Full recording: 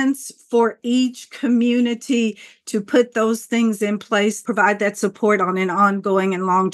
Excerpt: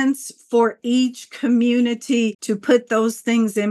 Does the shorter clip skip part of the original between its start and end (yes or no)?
yes